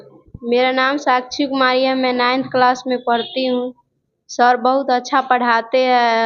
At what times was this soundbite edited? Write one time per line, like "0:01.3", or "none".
none